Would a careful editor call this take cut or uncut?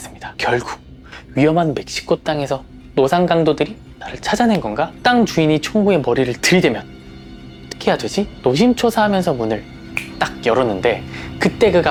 uncut